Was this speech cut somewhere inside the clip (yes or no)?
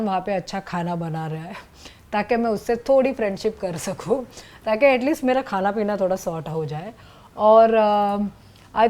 no